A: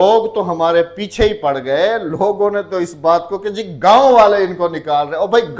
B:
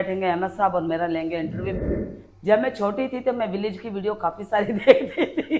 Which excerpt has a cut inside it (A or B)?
B